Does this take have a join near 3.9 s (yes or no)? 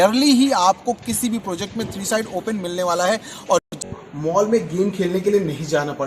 yes